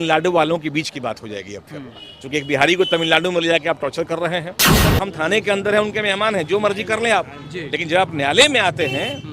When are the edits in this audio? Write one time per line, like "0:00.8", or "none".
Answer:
0:04.8